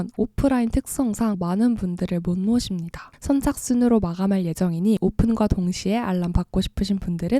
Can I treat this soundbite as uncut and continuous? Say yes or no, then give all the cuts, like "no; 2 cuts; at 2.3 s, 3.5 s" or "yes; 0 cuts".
no; 1 cut; at 1.4 s